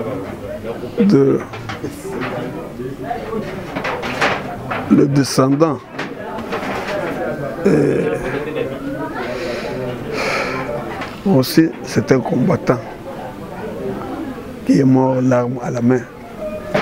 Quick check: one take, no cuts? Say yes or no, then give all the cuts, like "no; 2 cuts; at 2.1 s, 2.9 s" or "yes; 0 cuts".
no; 1 cut; at 11.0 s